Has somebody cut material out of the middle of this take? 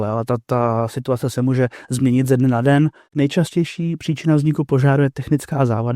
yes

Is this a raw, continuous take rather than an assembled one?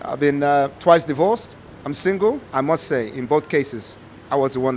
no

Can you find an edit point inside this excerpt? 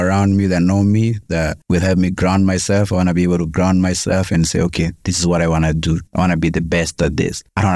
no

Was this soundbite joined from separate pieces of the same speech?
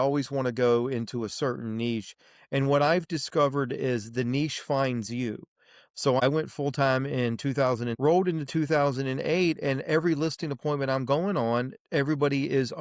yes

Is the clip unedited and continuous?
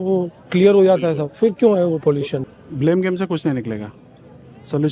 no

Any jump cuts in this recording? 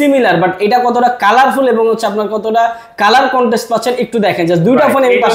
no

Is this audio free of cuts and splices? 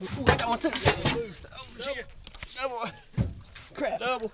yes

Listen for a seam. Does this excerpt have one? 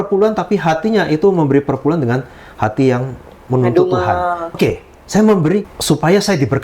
yes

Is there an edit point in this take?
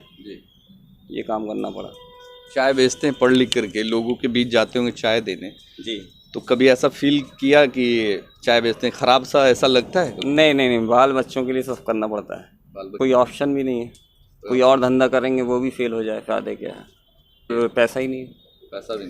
yes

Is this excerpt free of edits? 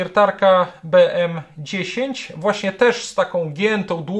yes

